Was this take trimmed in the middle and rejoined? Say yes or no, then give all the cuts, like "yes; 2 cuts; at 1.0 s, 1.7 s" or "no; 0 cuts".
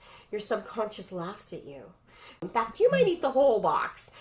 yes; 1 cut; at 2.4 s